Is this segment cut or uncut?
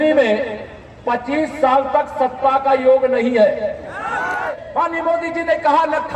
cut